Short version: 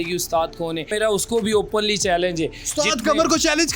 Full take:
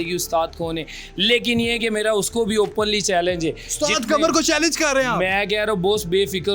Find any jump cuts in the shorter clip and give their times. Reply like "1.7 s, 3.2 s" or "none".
0.9 s